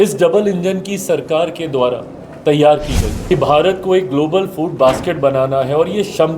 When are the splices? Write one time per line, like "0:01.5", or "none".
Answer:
0:03.3